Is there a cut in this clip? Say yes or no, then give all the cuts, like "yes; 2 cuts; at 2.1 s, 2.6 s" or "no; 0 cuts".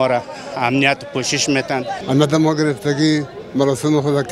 yes; 1 cut; at 2.0 s